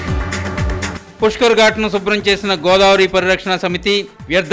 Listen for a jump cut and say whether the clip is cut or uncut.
cut